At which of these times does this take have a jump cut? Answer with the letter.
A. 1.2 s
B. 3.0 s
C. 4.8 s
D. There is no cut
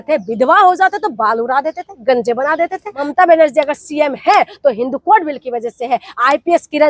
B